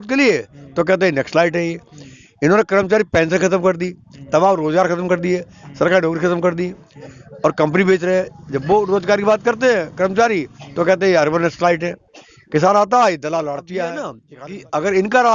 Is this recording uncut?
no; 1 cut; at 14.2 s

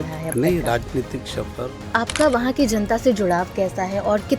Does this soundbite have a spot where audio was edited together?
yes; 1 cut; at 1.9 s

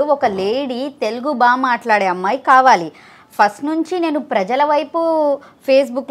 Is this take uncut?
yes; 0 cuts

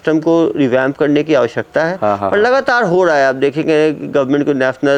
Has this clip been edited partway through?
no; 0 cuts

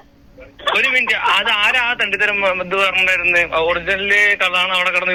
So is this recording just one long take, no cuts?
yes; 0 cuts

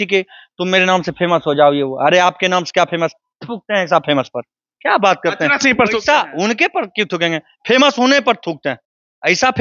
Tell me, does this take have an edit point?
no; 0 cuts

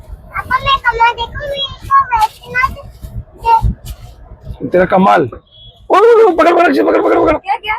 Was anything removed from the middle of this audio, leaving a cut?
no; 0 cuts

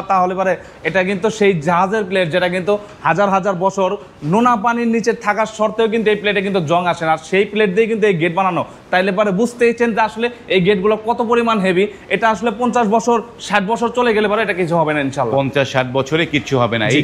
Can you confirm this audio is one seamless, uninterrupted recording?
yes; 0 cuts

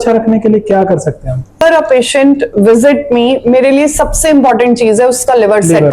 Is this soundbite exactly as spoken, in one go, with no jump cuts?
no; 1 cut; at 1.6 s

